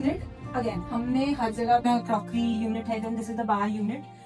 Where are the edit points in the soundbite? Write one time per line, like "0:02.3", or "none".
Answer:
0:01.8